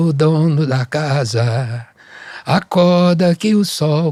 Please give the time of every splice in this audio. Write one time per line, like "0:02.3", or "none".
none

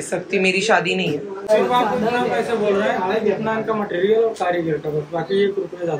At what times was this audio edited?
none

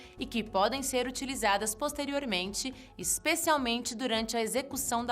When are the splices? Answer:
0:01.0

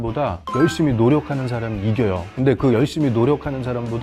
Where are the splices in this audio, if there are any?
none

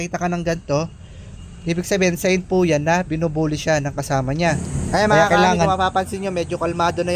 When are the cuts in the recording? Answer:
0:04.7

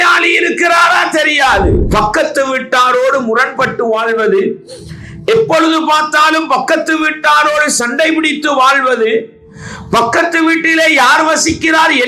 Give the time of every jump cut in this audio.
0:01.9

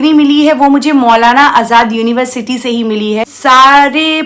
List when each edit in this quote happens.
0:03.2

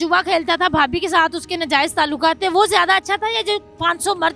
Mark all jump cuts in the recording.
none

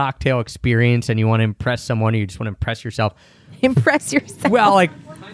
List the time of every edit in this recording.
none

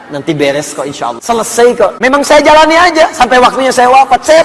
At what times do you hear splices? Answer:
0:01.2
0:02.0

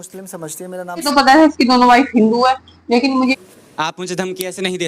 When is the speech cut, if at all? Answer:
0:01.1
0:03.3

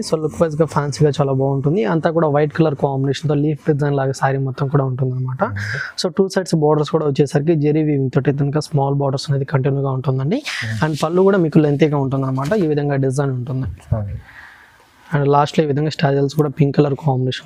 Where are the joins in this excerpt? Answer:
none

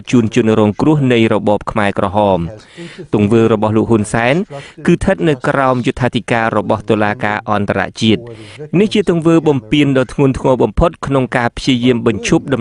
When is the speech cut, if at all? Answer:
none

